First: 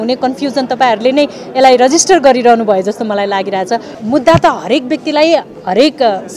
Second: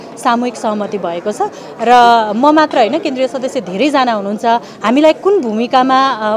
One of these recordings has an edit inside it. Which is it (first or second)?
first